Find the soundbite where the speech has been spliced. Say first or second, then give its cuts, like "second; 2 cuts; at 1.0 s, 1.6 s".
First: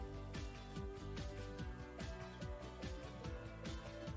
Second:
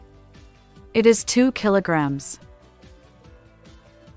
second; 2 cuts; at 0.9 s, 2.3 s